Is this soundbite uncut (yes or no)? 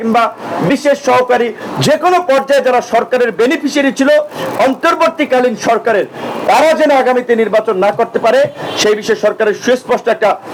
yes